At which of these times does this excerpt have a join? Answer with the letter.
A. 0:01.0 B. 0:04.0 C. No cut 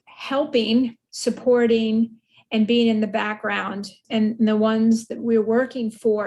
A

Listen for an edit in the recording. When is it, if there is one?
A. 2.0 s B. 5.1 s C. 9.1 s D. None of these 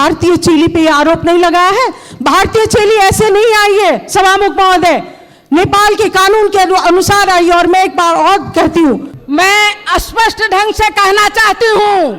C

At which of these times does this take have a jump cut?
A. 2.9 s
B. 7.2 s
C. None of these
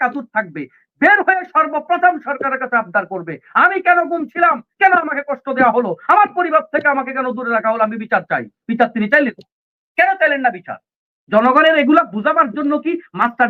C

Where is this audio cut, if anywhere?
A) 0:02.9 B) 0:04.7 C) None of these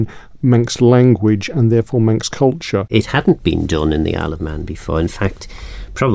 A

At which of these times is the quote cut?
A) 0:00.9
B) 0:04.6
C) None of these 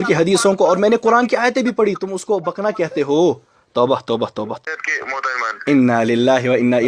B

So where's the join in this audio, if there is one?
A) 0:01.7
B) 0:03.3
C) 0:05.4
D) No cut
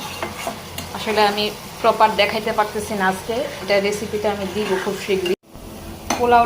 C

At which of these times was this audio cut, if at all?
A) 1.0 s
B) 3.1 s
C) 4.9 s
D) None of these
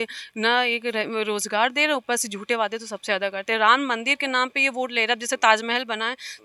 D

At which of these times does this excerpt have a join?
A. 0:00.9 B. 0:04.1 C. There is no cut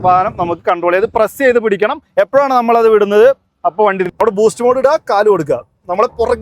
B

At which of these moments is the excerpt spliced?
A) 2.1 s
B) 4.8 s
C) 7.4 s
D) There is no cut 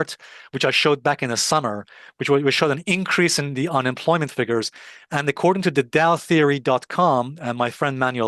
D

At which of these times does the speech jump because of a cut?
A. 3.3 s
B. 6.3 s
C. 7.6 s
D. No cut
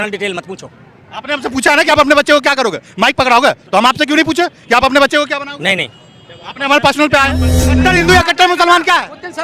C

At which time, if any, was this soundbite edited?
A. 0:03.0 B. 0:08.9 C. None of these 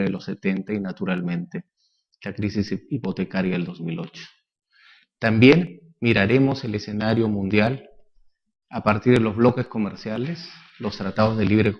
A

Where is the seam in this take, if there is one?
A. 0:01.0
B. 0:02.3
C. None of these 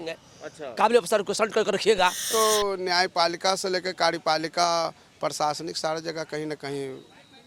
B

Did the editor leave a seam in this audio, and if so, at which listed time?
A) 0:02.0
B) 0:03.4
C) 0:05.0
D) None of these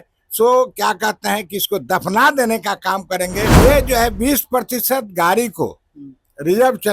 B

